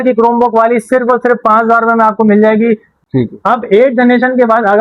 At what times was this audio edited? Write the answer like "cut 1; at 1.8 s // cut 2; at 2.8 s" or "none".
cut 1; at 3.0 s